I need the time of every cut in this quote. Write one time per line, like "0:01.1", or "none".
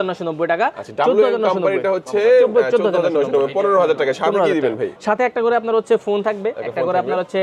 none